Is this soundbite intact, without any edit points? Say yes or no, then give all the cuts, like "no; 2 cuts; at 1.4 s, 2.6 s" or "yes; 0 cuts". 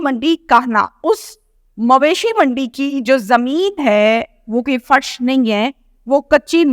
no; 1 cut; at 0.9 s